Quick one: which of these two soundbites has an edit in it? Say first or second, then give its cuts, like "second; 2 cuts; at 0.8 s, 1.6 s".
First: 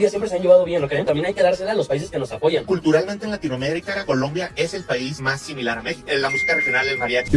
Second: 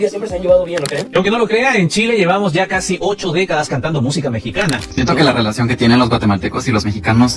second; 2 cuts; at 1.1 s, 4.9 s